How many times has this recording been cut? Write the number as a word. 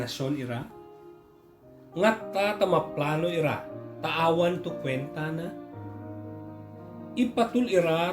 two